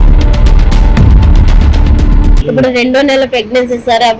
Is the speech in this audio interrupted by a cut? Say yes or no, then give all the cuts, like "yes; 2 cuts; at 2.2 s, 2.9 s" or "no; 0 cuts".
yes; 1 cut; at 2.3 s